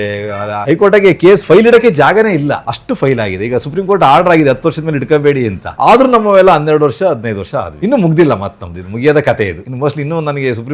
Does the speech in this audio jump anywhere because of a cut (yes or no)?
no